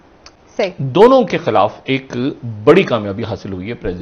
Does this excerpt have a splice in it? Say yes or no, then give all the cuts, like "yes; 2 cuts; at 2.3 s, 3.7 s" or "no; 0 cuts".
no; 0 cuts